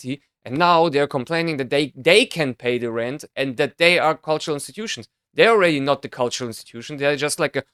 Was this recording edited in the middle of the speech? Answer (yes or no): no